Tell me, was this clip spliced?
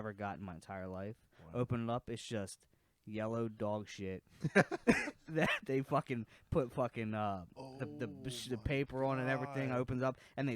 no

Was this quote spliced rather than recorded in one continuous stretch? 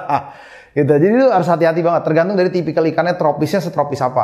no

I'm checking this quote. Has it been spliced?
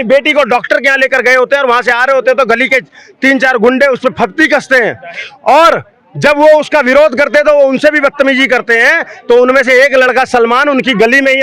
no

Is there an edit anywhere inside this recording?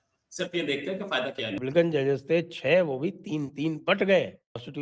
no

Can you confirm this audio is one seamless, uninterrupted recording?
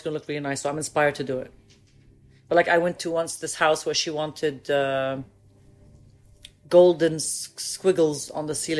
yes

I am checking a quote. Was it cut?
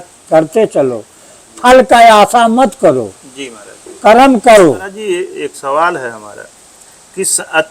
yes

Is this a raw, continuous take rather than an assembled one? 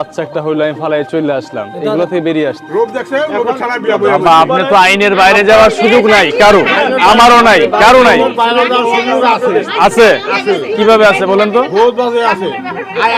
no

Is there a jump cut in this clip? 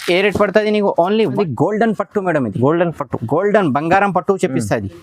yes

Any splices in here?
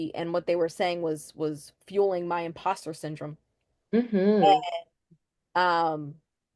no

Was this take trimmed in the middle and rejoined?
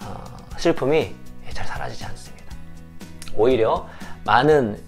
no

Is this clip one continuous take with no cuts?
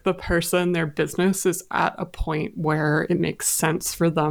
yes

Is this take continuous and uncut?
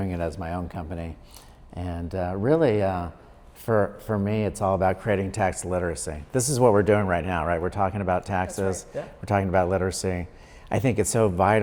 yes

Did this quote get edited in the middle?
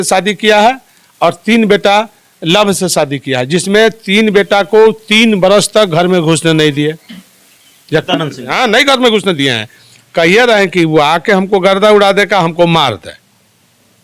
yes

